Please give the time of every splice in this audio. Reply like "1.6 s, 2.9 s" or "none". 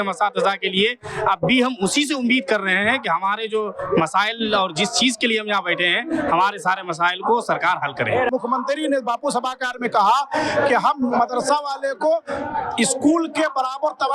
none